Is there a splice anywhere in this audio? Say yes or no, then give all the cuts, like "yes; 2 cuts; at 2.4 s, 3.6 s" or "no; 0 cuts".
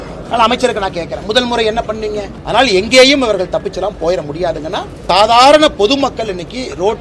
yes; 2 cuts; at 2.3 s, 4.9 s